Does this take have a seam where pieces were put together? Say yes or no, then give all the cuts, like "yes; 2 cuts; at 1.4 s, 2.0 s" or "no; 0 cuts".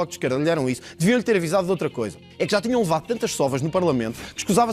no; 0 cuts